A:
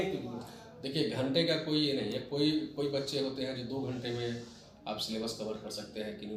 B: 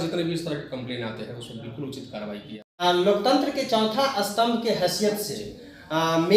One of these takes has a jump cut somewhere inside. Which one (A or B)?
B